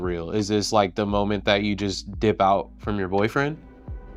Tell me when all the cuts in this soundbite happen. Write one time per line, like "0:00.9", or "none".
none